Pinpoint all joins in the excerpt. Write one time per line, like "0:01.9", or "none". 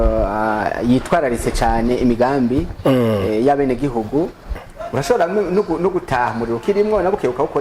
0:04.6